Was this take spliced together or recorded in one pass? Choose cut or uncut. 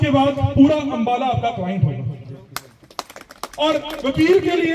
uncut